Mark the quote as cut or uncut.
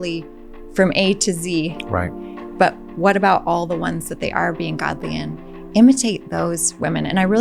uncut